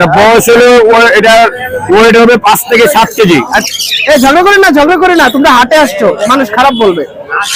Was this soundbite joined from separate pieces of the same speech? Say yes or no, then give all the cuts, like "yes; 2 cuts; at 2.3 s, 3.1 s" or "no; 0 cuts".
yes; 1 cut; at 3.6 s